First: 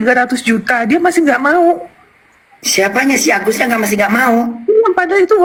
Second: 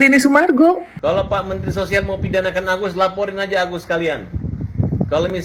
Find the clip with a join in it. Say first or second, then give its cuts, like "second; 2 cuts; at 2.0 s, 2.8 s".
second; 1 cut; at 0.9 s